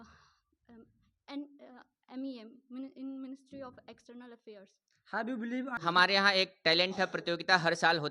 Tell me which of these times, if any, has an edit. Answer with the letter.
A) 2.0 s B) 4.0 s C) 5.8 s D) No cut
C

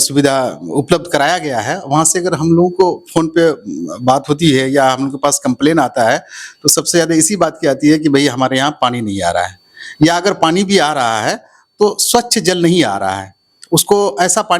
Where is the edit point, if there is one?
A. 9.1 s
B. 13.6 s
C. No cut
C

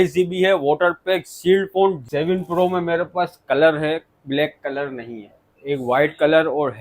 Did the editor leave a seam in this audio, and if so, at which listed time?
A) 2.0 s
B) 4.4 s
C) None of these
A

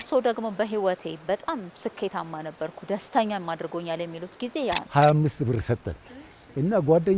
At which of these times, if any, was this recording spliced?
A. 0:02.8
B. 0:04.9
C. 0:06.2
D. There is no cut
B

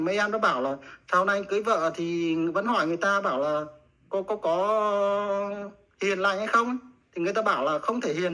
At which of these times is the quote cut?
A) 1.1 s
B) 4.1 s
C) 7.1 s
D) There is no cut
D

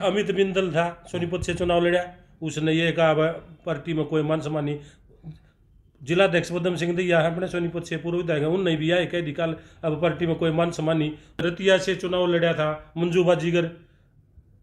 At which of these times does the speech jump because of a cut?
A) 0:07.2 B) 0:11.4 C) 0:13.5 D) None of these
B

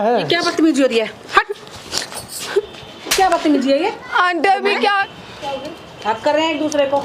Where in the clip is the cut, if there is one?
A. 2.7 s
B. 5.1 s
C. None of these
B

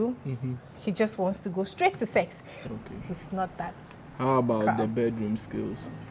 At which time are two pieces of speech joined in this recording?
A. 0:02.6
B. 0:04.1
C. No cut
A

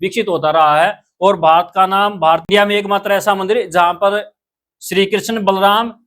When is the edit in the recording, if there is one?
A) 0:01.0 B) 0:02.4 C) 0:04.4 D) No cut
B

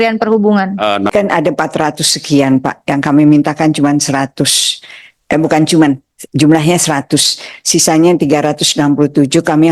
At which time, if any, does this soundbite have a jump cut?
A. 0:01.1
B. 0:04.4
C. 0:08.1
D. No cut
A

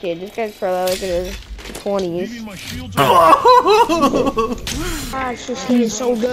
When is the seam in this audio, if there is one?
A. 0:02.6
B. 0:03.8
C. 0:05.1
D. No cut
C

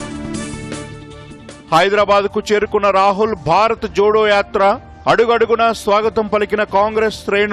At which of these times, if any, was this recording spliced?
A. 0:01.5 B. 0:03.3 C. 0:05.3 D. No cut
A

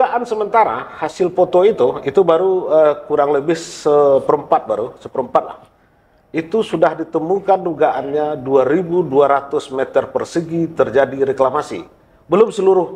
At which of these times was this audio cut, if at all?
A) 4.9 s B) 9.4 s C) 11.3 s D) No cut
D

